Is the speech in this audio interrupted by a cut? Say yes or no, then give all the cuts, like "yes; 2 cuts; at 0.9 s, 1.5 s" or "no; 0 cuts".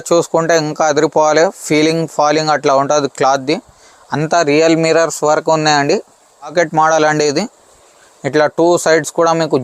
yes; 1 cut; at 6.5 s